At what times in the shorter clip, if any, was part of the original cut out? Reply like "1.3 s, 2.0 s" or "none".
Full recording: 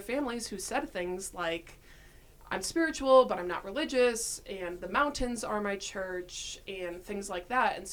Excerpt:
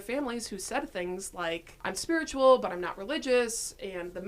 1.7 s